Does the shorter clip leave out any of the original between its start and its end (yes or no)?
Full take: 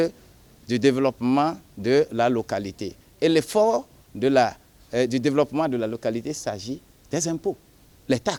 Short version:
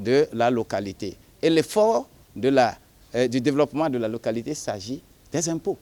no